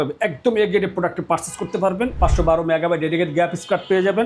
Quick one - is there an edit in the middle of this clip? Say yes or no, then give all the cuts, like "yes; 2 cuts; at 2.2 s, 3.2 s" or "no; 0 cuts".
yes; 1 cut; at 2.2 s